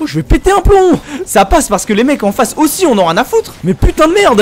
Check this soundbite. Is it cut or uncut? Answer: uncut